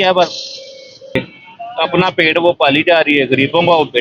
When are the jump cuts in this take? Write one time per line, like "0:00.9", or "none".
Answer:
0:01.1